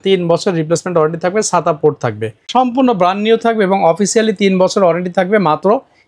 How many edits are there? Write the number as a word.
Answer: one